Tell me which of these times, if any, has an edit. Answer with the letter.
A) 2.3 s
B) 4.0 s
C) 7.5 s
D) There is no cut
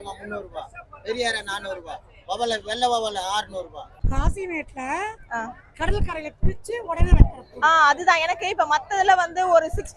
B